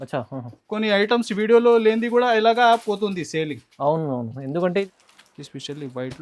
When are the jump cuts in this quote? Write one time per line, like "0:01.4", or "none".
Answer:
0:04.8